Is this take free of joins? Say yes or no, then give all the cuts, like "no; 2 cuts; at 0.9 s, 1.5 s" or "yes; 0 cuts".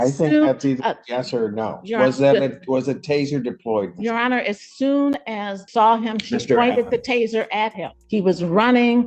no; 2 cuts; at 5.6 s, 8.0 s